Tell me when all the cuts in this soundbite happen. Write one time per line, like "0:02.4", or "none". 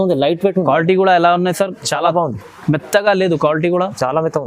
none